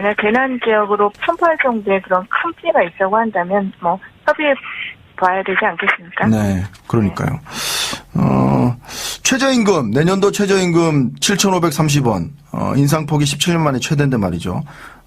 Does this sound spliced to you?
yes; 1 cut; at 9.9 s

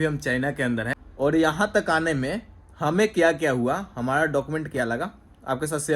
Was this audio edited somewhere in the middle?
yes; 1 cut; at 1.0 s

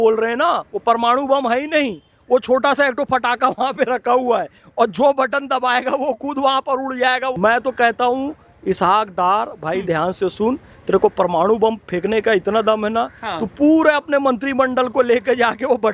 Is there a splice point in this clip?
yes; 1 cut; at 7.3 s

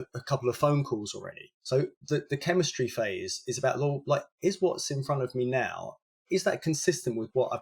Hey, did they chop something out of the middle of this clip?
yes; 1 cut; at 6.0 s

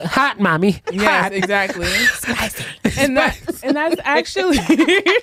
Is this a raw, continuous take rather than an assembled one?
yes; 0 cuts

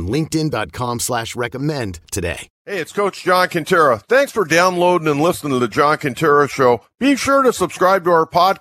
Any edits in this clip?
yes; 1 cut; at 2.5 s

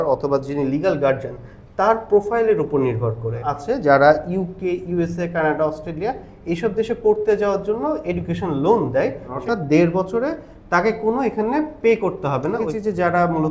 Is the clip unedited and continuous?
no; 3 cuts; at 3.5 s, 9.3 s, 12.6 s

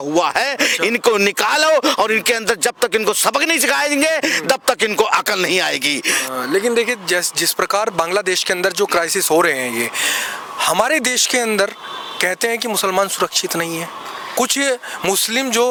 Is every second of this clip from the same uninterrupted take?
yes; 0 cuts

